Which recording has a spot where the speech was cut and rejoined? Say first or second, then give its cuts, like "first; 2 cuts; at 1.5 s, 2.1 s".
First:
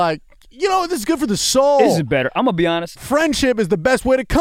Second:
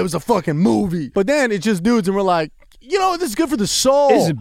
second; 1 cut; at 1.0 s